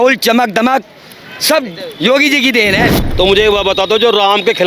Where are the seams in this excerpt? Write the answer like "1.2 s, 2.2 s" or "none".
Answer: 3.0 s